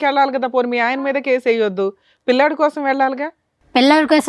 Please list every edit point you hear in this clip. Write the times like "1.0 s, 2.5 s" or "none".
none